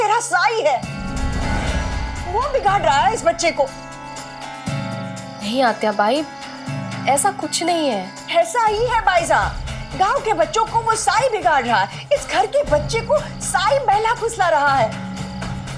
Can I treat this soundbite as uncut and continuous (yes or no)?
no